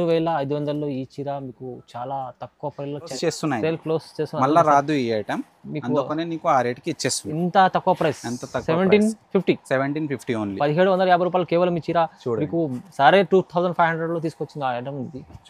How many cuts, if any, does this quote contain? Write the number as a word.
one